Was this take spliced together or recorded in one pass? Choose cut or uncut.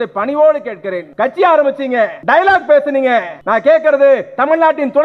cut